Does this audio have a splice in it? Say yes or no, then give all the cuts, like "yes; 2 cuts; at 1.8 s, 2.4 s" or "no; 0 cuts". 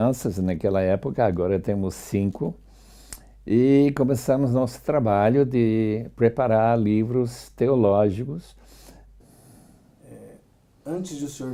no; 0 cuts